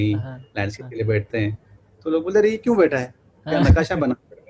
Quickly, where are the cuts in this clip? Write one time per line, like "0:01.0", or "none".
none